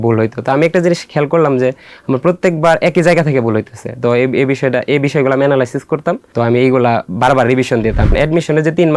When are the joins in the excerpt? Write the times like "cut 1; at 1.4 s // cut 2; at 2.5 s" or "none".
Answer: cut 1; at 6.2 s // cut 2; at 8.1 s